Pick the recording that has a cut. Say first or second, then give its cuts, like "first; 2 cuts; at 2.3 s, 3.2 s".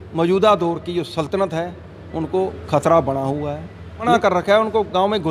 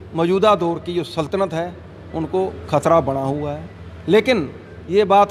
first; 1 cut; at 4.1 s